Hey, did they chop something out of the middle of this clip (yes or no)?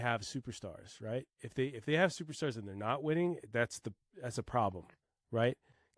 no